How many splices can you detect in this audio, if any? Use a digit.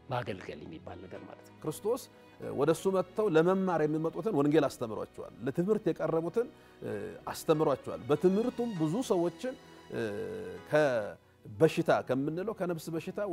1